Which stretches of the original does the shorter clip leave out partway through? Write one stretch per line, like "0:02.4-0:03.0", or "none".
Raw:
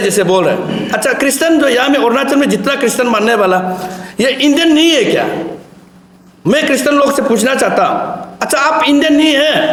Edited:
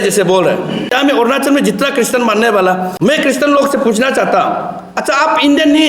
0:00.9-0:01.8
0:03.7-0:06.3